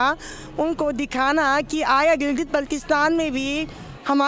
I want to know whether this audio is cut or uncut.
uncut